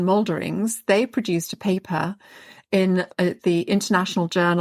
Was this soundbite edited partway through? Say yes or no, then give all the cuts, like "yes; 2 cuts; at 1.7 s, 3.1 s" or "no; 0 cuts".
yes; 1 cut; at 3.1 s